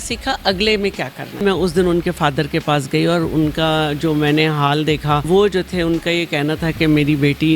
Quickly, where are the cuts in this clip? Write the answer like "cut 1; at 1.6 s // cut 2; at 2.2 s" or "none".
cut 1; at 1.4 s // cut 2; at 5.3 s

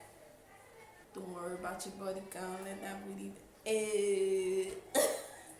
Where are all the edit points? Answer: cut 1; at 1.1 s

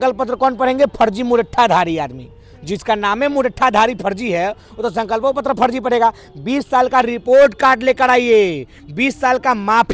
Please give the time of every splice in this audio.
none

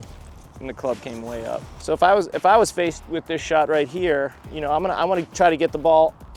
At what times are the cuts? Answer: cut 1; at 1.7 s

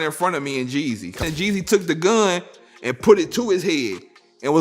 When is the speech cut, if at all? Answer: cut 1; at 1.2 s

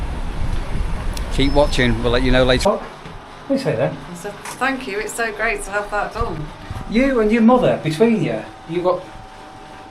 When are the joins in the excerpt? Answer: cut 1; at 2.6 s

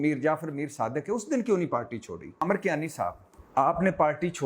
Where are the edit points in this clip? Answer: cut 1; at 2.4 s // cut 2; at 3.3 s

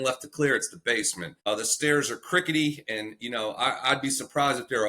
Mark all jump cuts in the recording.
cut 1; at 1.2 s

